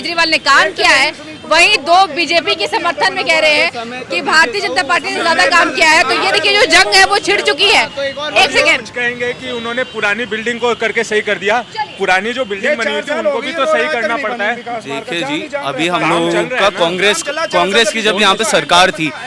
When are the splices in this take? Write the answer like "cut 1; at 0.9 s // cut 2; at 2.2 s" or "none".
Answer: none